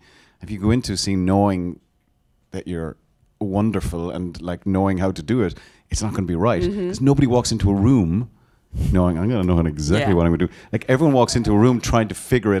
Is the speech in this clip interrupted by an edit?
no; 0 cuts

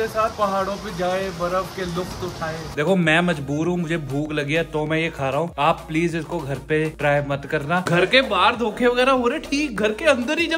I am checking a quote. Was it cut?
yes; 2 cuts; at 2.7 s, 7.9 s

